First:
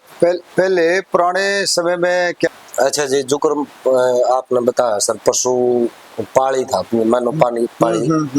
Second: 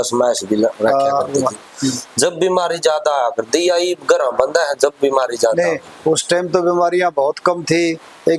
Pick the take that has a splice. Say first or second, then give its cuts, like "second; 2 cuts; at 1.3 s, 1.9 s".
first; 1 cut; at 2.5 s